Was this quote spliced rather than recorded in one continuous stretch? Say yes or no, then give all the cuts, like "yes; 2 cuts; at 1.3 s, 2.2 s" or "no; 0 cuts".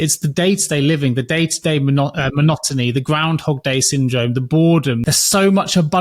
yes; 1 cut; at 5.0 s